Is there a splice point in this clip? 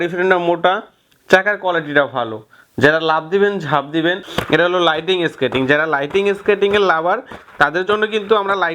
yes; 1 cut; at 4.3 s

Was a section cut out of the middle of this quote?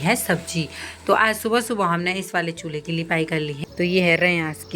yes; 1 cut; at 3.5 s

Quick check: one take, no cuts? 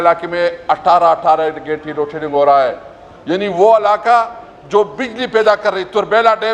yes; 0 cuts

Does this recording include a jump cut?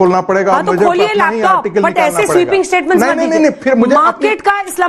no; 0 cuts

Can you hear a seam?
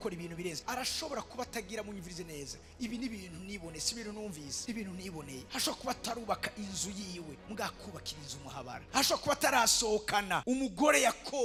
no; 0 cuts

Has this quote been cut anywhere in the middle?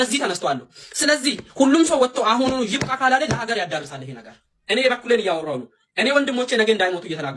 no; 0 cuts

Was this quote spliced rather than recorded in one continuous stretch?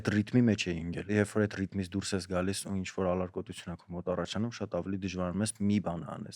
yes; 1 cut; at 1.1 s

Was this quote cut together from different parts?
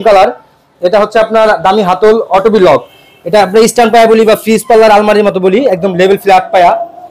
no; 0 cuts

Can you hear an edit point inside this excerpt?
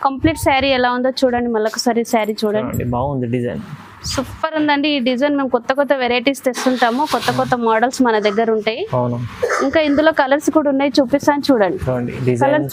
no; 0 cuts

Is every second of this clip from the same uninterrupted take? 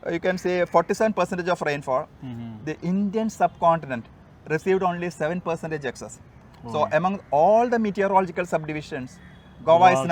yes; 0 cuts

